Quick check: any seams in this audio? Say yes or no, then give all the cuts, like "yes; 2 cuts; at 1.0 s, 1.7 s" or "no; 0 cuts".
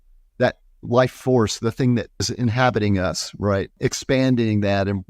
yes; 2 cuts; at 2.3 s, 3.8 s